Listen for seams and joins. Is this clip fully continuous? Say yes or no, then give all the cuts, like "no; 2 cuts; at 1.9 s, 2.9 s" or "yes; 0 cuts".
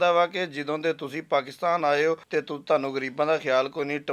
no; 1 cut; at 2.2 s